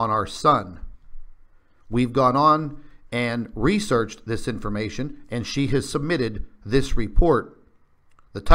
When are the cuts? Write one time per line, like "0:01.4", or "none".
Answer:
0:05.6